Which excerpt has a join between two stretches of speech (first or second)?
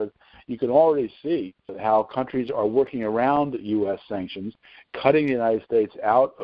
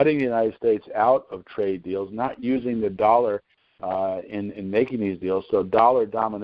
first